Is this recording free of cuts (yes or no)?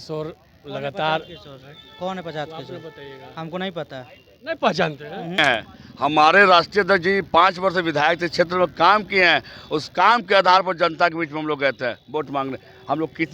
no